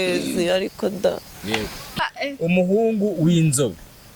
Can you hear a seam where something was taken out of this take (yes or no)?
yes